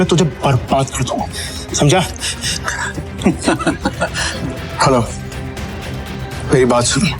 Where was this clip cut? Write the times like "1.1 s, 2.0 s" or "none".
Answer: 4.2 s